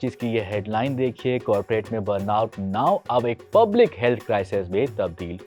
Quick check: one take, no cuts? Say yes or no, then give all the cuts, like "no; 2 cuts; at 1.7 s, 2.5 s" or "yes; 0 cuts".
yes; 0 cuts